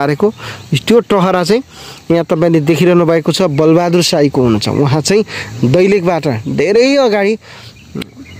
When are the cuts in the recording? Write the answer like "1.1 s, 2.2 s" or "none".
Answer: none